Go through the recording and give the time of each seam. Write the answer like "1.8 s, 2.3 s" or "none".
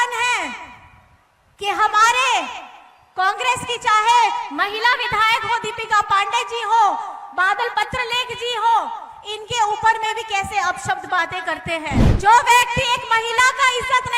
12.1 s